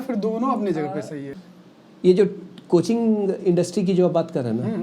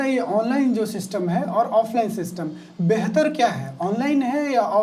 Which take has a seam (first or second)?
first